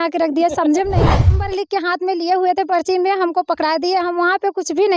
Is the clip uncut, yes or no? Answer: no